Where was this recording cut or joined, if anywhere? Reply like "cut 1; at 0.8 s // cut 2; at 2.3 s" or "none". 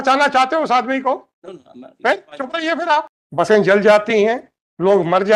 cut 1; at 3.2 s